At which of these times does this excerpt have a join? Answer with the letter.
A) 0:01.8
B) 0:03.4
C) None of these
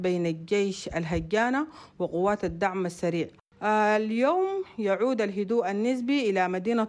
B